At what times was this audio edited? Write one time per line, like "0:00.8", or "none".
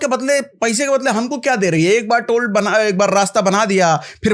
none